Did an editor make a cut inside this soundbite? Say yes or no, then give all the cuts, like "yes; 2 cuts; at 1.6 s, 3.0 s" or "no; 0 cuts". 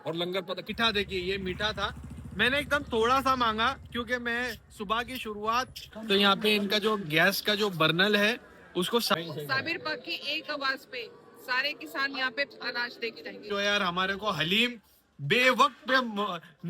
yes; 4 cuts; at 0.7 s, 5.9 s, 9.1 s, 13.5 s